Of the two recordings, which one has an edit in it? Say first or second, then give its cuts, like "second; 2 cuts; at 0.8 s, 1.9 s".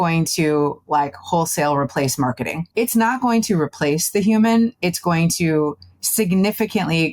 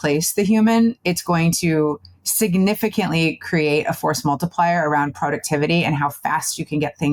first; 1 cut; at 2.5 s